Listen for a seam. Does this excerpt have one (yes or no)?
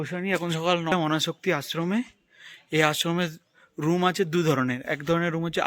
yes